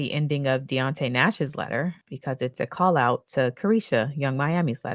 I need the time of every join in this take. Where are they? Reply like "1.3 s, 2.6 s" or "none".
2.1 s